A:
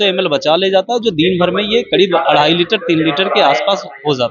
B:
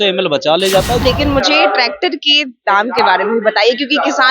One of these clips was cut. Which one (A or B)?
B